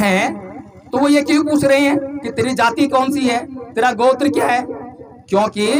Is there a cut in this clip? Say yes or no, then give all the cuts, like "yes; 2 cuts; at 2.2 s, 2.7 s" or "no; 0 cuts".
no; 0 cuts